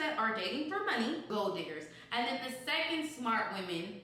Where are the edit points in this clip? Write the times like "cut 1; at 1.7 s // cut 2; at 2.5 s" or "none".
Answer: cut 1; at 1.3 s